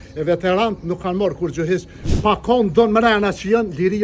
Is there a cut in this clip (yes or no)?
yes